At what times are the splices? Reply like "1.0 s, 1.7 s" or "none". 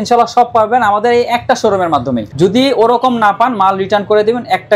2.3 s